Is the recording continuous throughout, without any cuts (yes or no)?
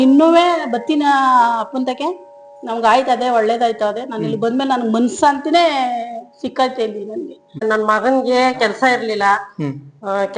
no